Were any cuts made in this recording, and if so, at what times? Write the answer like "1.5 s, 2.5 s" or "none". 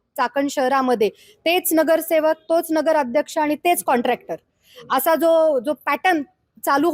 none